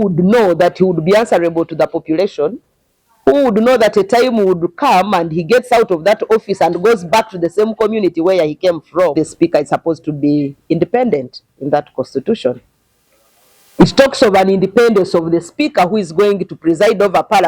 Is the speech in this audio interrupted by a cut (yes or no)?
yes